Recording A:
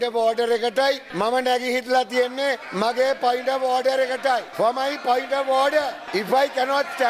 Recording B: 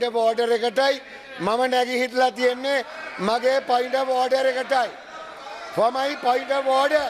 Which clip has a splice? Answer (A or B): A